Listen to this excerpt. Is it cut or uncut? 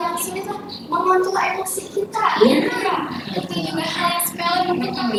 uncut